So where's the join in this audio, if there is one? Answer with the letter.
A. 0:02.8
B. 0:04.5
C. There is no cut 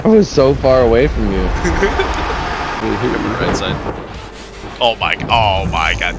A